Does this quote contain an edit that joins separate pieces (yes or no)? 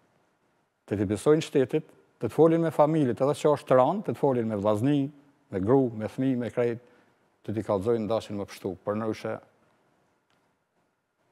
no